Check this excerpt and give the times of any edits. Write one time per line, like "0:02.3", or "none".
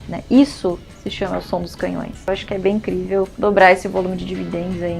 0:02.2